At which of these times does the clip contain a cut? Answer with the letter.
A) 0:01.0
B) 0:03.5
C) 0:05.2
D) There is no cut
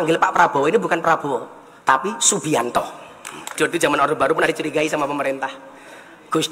B